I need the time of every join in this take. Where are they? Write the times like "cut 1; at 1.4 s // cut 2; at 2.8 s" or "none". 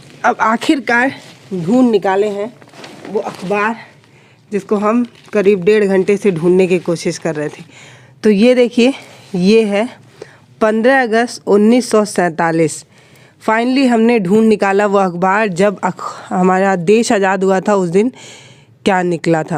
none